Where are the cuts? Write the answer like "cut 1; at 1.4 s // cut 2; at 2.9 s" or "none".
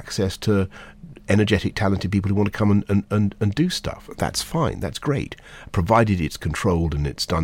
none